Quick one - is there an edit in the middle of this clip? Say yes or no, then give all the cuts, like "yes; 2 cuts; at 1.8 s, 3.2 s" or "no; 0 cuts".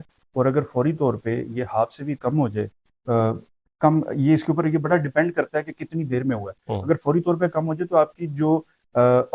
no; 0 cuts